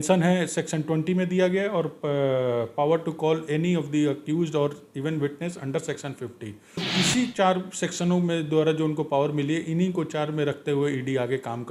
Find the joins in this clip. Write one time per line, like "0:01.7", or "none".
0:06.9

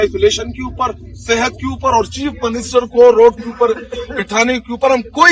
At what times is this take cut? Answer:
none

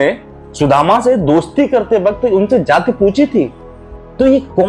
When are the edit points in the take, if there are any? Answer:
none

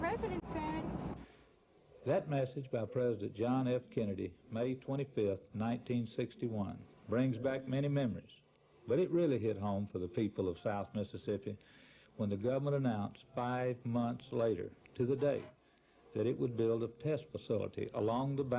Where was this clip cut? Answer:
0:17.6

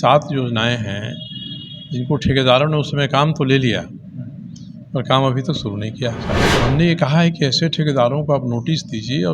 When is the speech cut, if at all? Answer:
0:06.4

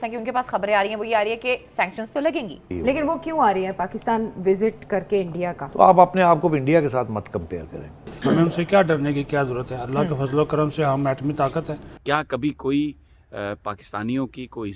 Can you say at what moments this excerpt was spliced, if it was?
0:02.7
0:05.6
0:08.1
0:11.8

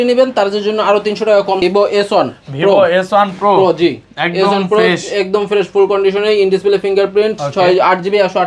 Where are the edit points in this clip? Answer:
0:01.6

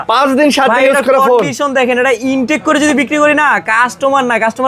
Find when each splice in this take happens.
none

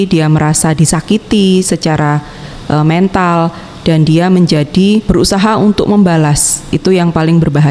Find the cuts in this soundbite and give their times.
0:05.1

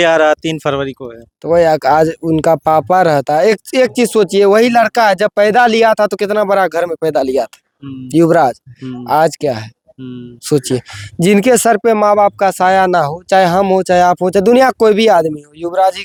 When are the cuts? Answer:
none

